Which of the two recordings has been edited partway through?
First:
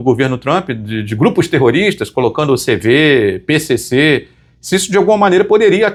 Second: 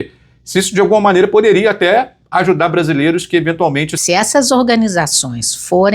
second; 1 cut; at 3.9 s

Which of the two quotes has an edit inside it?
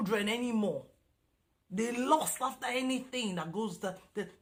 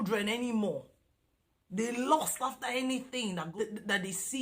second; 1 cut; at 3.5 s

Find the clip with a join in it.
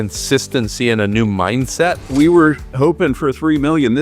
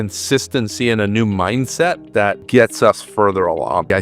first; 1 cut; at 2.0 s

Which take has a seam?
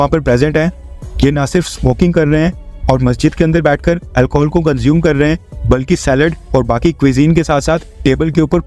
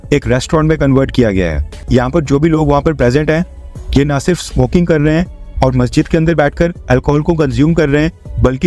second; 1 cut; at 1.8 s

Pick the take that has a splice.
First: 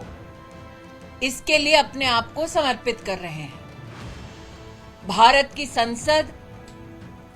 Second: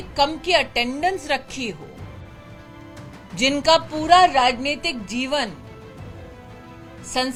first; 2 cuts; at 3.5 s, 5.0 s

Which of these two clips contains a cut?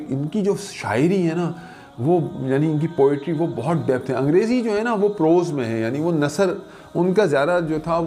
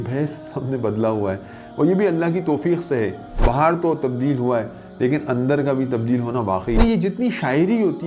second; 2 cuts; at 3.3 s, 6.8 s

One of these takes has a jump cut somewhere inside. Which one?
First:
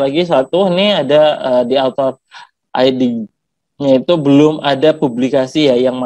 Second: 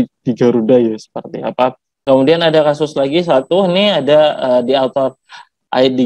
second; 1 cut; at 2.0 s

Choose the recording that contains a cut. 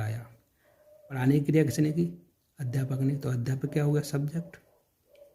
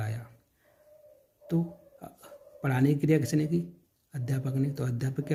first; 1 cut; at 1.2 s

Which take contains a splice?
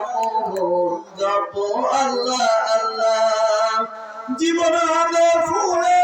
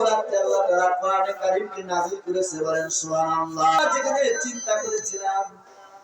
second; 1 cut; at 3.8 s

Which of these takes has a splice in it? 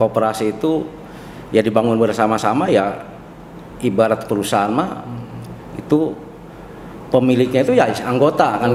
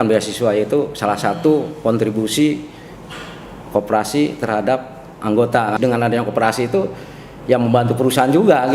second; 1 cut; at 5.8 s

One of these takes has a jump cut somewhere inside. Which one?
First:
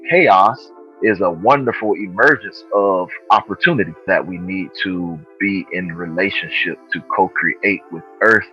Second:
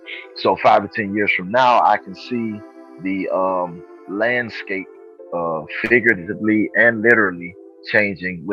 first; 1 cut; at 4.0 s

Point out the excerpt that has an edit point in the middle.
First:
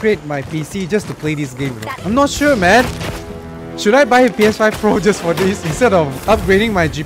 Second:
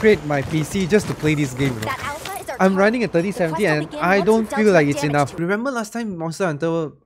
first; 2 cuts; at 1.9 s, 6.2 s

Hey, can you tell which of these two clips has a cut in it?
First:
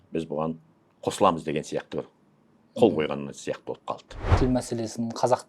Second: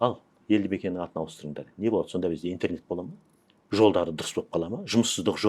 first; 1 cut; at 4.2 s

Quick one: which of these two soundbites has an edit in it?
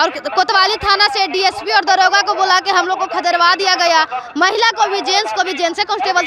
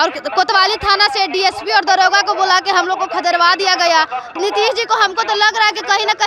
second; 1 cut; at 4.4 s

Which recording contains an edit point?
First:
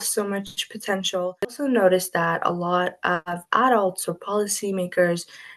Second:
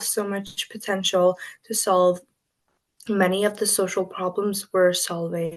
first; 1 cut; at 1.6 s

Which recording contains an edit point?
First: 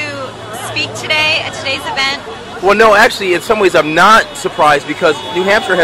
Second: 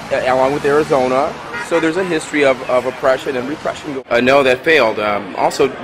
second; 1 cut; at 3.9 s

